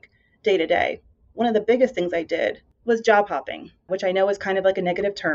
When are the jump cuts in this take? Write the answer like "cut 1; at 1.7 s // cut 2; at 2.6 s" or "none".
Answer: cut 1; at 2.7 s